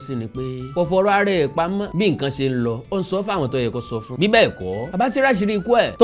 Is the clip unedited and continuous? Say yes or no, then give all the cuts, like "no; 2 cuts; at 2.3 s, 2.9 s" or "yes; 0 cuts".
yes; 0 cuts